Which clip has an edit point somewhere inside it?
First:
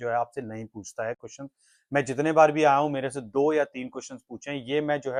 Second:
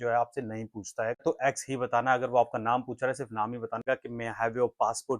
second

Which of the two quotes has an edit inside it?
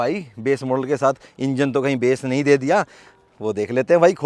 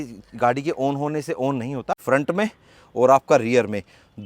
second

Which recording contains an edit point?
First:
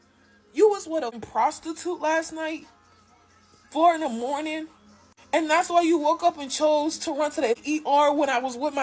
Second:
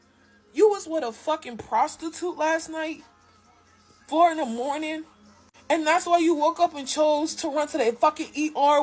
first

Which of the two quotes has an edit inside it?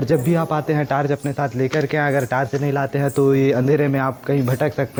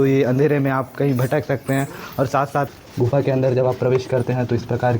second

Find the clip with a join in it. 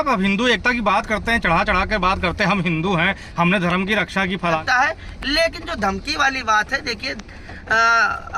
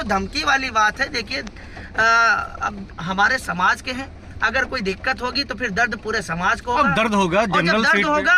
first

